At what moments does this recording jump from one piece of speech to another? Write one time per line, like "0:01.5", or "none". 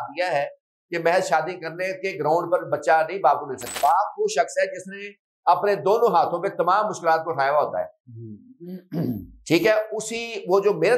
0:03.7